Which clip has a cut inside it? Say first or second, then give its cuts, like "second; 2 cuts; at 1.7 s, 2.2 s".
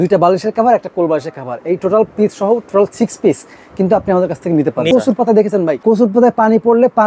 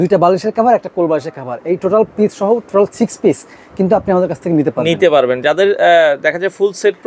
first; 2 cuts; at 4.9 s, 5.8 s